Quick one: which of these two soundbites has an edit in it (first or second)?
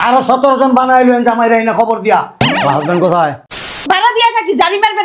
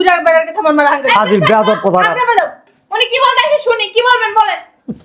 first